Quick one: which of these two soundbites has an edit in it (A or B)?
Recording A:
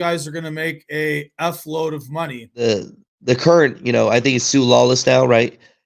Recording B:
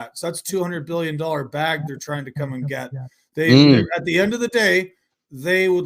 A